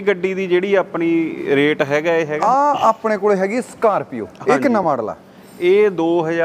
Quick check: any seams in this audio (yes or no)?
yes